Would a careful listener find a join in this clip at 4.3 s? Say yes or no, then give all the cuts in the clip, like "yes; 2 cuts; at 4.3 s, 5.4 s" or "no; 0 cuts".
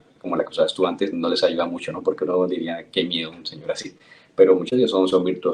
yes; 1 cut; at 4.3 s